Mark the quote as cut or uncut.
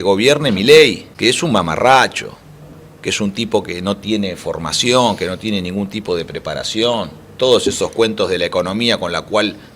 cut